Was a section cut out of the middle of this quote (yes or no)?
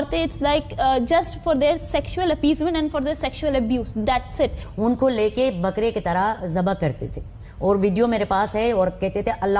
yes